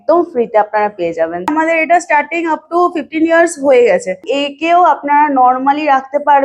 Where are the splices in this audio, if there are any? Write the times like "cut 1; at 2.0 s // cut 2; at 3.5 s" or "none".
cut 1; at 1.5 s // cut 2; at 4.2 s